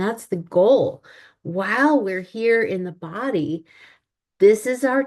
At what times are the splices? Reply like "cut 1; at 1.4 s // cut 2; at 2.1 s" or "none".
none

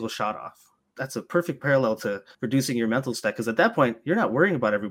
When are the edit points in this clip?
cut 1; at 0.9 s // cut 2; at 2.3 s

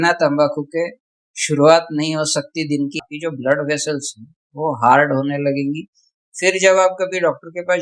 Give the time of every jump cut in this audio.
cut 1; at 3.1 s

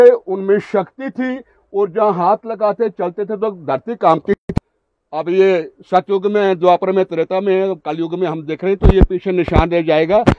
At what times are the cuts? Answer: cut 1; at 4.4 s

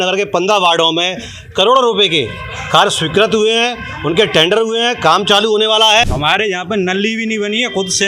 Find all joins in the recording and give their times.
cut 1; at 6.1 s

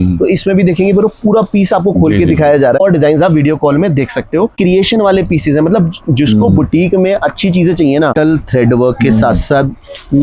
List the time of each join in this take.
cut 1; at 2.8 s // cut 2; at 4.5 s // cut 3; at 8.1 s

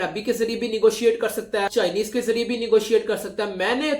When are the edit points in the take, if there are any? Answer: cut 1; at 1.7 s

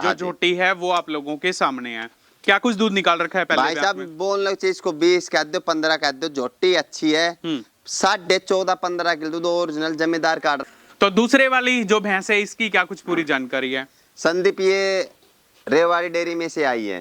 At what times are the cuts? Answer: cut 1; at 10.6 s

